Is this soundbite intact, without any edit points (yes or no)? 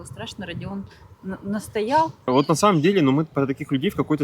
no